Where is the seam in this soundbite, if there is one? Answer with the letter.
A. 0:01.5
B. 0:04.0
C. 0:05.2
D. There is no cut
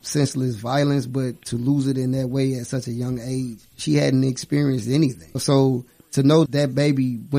C